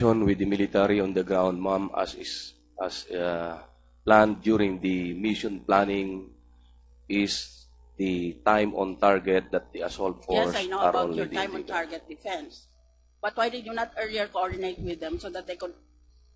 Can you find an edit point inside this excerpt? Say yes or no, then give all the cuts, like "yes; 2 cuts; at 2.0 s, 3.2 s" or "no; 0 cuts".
yes; 1 cut; at 1.6 s